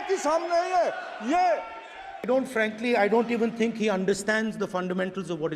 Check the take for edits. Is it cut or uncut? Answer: cut